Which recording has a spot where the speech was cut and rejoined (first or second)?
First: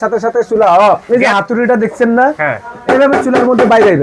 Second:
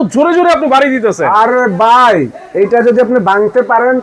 first